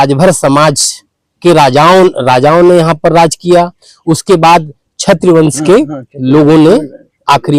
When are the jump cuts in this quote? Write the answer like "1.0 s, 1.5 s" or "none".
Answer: none